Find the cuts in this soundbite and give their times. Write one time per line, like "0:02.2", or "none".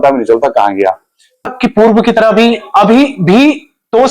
0:01.5